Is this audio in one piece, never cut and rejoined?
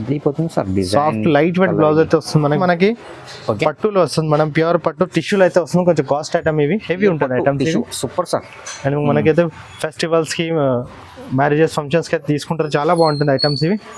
no; 1 cut; at 2.6 s

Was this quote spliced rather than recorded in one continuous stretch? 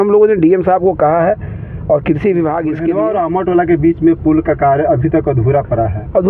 yes; 1 cut; at 2.9 s

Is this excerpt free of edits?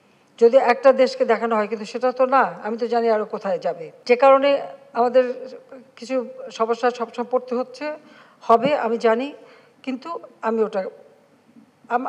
yes; 0 cuts

